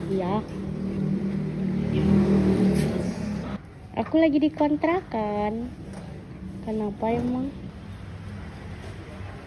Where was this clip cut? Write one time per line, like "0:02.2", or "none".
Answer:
0:03.5
0:07.7